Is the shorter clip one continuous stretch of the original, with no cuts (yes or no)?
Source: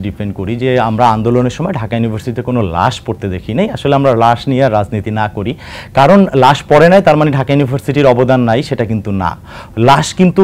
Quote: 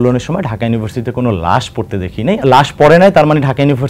no